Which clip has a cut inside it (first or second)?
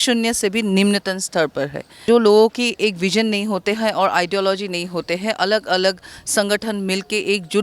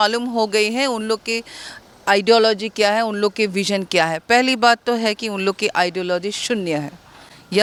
first